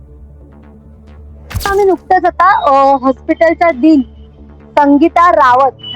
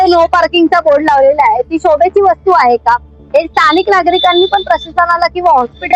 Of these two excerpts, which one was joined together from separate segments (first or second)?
first